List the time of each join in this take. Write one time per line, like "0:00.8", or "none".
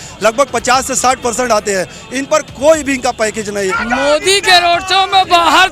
0:03.7